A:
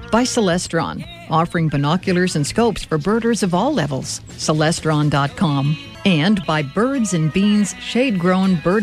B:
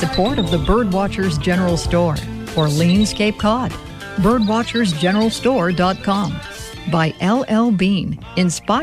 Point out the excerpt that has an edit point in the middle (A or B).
A